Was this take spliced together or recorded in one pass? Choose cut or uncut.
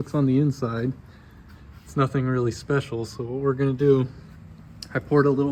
uncut